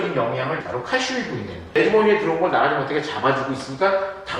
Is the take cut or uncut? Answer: cut